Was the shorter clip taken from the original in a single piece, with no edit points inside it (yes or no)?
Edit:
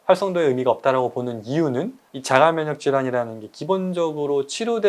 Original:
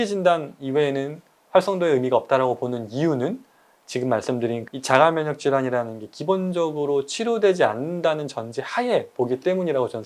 no